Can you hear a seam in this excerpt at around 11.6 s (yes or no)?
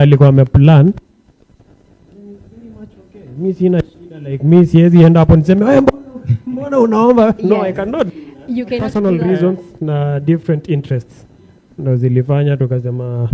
no